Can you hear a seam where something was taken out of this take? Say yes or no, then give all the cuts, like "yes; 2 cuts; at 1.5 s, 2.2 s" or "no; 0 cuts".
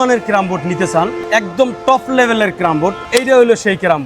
yes; 2 cuts; at 1.2 s, 3.0 s